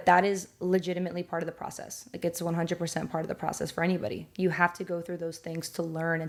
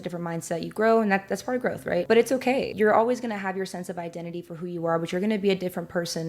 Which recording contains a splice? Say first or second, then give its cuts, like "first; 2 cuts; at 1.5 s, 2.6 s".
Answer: second; 2 cuts; at 2.0 s, 2.7 s